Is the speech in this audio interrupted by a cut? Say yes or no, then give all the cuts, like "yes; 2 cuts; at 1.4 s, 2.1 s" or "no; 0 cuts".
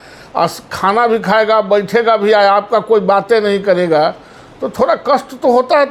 no; 0 cuts